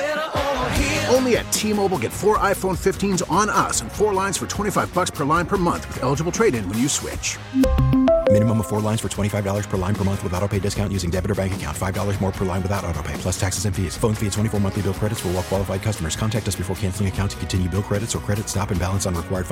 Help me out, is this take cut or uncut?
uncut